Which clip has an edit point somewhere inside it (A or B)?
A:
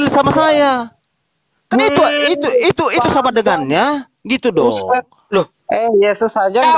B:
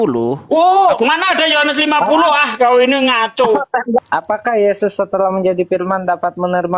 B